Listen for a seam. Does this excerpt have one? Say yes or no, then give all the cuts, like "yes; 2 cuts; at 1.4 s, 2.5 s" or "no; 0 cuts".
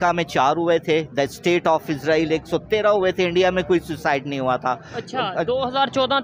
no; 0 cuts